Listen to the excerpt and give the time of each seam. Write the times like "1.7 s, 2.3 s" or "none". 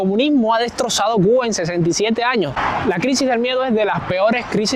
2.5 s

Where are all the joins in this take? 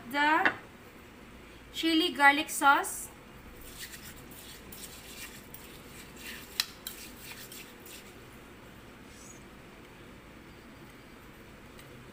none

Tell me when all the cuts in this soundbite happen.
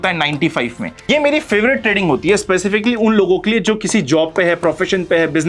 1.0 s

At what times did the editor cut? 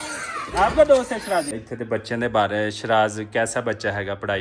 1.7 s

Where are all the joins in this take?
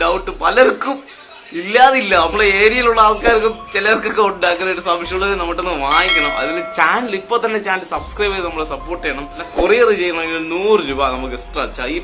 5.1 s, 9.5 s

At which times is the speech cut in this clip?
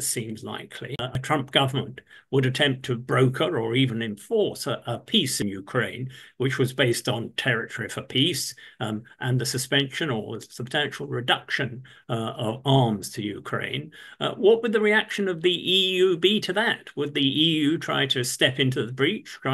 1.2 s, 5.3 s

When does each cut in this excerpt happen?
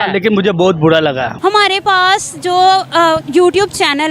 1.3 s

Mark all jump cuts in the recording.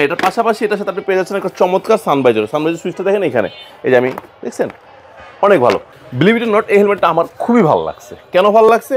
5.9 s

